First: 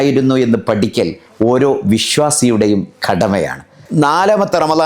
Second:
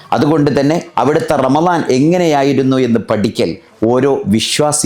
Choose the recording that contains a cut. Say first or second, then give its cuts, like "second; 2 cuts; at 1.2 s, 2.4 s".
first; 1 cut; at 3.8 s